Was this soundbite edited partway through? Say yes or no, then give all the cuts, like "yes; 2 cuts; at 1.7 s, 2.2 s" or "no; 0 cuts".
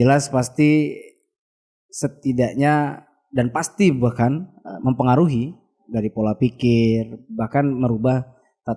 no; 0 cuts